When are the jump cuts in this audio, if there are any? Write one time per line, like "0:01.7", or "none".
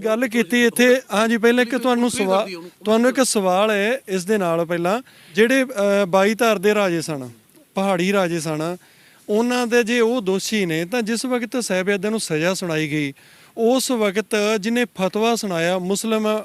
0:05.2